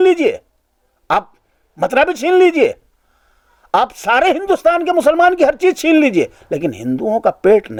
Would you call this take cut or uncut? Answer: uncut